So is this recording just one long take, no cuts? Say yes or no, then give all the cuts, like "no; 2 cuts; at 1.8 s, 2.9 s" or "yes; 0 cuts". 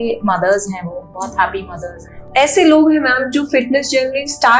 no; 1 cut; at 2.2 s